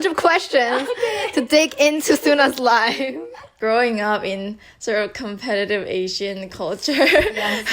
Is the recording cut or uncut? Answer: cut